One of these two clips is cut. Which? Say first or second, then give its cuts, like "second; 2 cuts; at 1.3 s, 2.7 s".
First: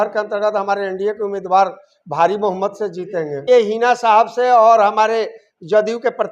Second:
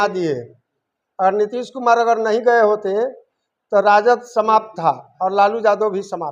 first; 1 cut; at 3.4 s